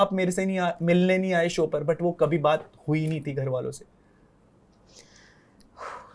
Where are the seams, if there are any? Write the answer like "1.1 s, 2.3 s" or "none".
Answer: none